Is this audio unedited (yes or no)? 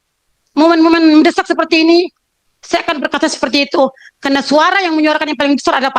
yes